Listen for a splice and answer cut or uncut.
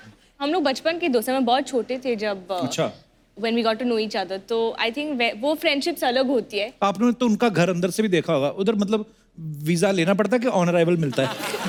uncut